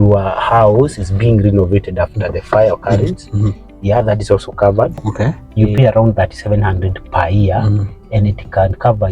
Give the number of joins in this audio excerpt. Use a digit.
1